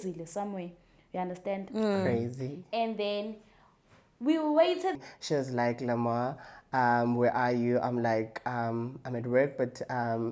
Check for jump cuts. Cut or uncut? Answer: cut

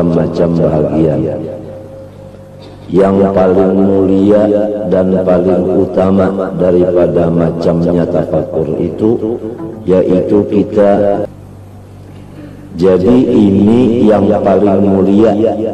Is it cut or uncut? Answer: cut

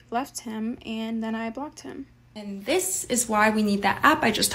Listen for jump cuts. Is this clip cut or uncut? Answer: cut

